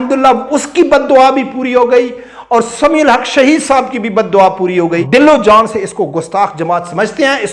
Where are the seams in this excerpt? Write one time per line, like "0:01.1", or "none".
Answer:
0:05.0

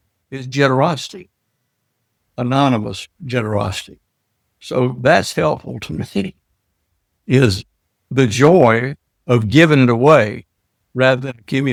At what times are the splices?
none

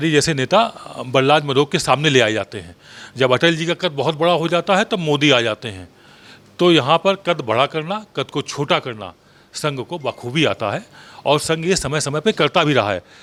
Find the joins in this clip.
none

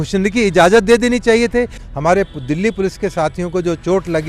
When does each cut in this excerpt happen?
0:01.8

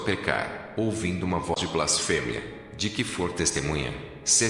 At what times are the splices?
0:01.5

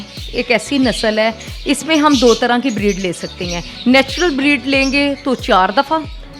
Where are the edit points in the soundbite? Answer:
none

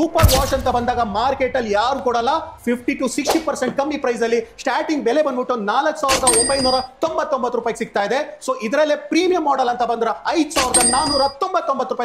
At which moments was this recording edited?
none

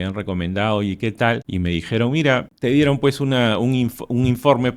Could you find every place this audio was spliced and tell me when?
0:01.5
0:02.5

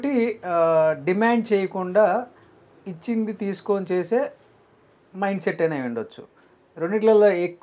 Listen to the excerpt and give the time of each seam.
none

